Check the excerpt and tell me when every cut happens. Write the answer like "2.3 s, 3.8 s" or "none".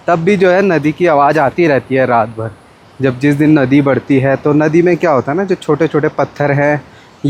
none